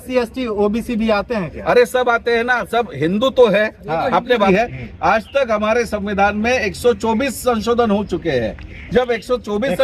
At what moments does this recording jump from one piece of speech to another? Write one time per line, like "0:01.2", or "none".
0:04.5

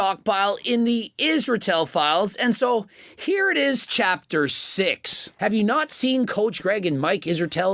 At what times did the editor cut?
0:05.3

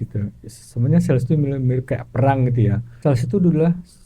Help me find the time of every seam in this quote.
0:02.9

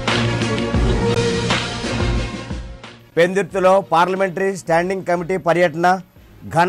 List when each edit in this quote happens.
none

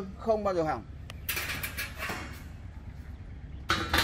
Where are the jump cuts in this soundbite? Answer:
none

